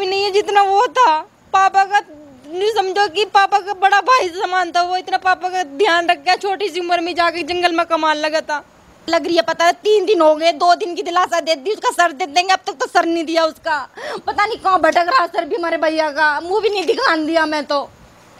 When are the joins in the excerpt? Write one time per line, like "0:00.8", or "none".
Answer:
0:08.9